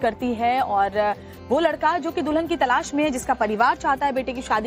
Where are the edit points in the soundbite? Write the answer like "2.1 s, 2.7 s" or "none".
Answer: 2.9 s